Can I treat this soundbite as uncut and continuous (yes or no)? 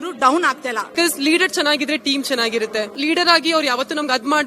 no